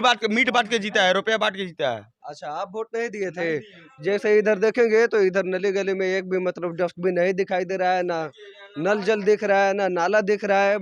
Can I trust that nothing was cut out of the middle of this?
yes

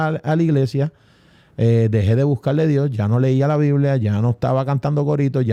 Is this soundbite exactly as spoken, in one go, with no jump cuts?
yes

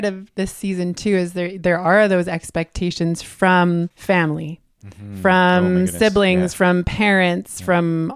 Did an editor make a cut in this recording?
yes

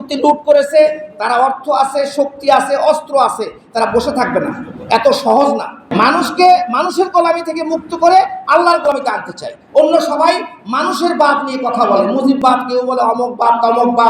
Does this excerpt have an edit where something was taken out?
yes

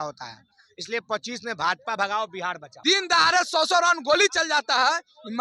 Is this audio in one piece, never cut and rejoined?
no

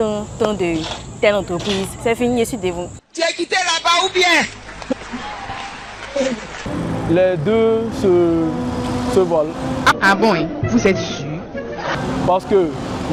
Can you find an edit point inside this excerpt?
no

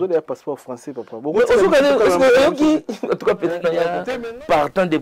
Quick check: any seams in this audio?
yes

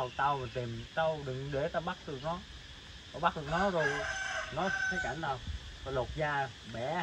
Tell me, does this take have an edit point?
no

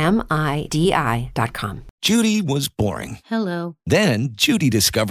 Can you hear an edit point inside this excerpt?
yes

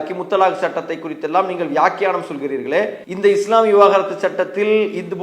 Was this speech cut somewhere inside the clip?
yes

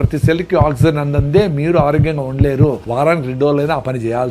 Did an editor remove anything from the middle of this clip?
yes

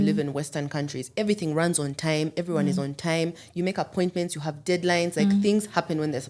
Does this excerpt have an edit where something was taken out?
no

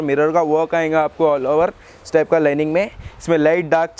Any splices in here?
no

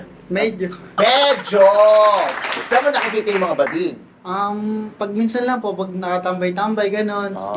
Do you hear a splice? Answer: yes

